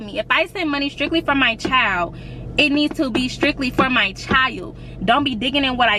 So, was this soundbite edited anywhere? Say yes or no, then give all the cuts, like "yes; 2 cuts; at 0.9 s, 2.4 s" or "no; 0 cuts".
no; 0 cuts